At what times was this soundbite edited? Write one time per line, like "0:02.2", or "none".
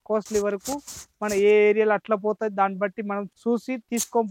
0:03.3